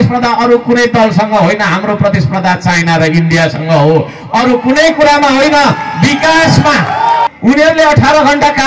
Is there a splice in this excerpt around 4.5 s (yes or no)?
no